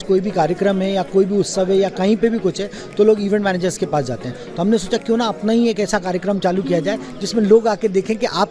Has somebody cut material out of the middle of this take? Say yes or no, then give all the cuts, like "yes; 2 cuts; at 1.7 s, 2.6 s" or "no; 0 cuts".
no; 0 cuts